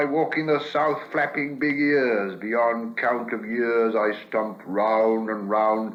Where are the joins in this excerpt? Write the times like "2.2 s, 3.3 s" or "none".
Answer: none